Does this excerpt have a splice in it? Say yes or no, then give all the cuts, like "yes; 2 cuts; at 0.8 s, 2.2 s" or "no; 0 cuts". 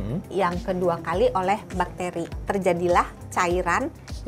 yes; 1 cut; at 2.4 s